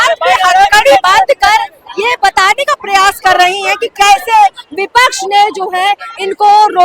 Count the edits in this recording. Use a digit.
0